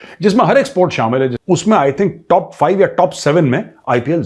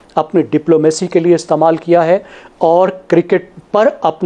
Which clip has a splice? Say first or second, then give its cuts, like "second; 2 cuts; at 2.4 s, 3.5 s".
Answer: first; 1 cut; at 1.4 s